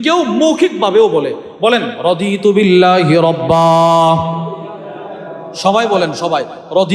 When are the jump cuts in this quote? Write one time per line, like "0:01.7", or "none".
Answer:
none